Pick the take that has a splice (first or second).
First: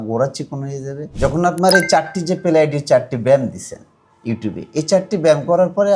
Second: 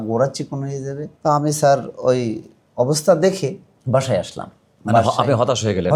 first